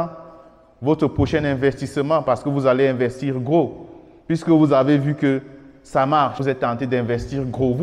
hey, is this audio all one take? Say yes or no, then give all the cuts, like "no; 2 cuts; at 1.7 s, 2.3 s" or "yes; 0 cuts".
no; 1 cut; at 6.4 s